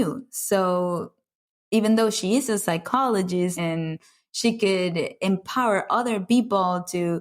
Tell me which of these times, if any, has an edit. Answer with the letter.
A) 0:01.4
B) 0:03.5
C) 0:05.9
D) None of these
B